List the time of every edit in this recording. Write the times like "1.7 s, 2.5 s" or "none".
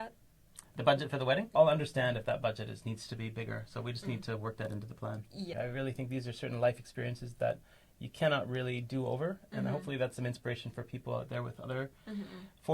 1.5 s, 5.5 s